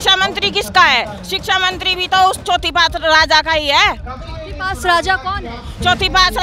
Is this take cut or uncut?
uncut